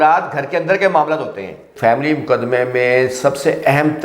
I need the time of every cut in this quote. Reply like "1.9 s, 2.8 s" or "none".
1.7 s